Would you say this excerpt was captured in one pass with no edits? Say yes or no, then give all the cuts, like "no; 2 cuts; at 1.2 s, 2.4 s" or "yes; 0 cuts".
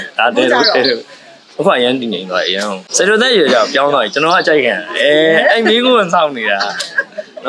no; 1 cut; at 2.8 s